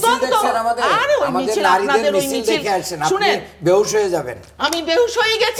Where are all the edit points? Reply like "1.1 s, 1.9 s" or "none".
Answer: none